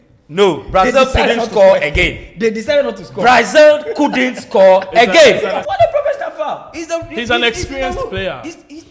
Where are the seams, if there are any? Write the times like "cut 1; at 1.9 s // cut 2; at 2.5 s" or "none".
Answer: cut 1; at 5.6 s